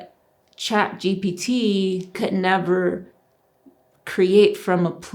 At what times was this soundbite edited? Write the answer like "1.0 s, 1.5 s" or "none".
2.1 s